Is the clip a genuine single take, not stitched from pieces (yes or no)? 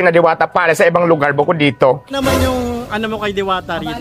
no